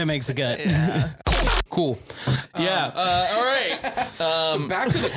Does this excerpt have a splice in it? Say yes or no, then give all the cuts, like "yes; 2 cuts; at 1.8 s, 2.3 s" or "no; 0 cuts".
yes; 1 cut; at 1.3 s